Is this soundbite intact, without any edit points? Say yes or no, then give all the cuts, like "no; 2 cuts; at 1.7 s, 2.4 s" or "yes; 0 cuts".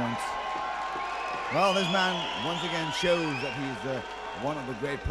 yes; 0 cuts